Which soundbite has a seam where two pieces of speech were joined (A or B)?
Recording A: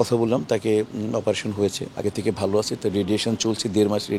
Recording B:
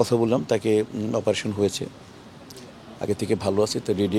A